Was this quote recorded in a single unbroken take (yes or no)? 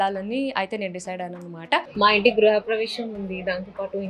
no